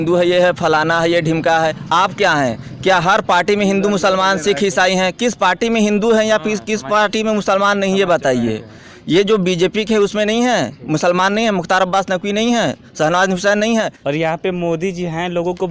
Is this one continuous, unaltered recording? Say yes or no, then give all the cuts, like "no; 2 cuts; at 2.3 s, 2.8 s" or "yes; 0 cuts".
no; 1 cut; at 13.8 s